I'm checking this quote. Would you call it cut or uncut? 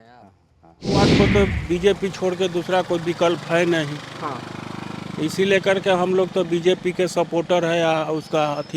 cut